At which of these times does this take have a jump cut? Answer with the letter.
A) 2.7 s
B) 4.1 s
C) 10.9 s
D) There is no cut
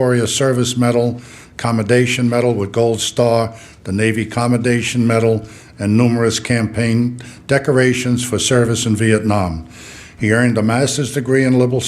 A